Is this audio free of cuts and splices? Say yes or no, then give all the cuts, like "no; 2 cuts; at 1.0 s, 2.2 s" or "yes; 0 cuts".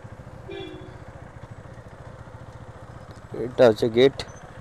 yes; 0 cuts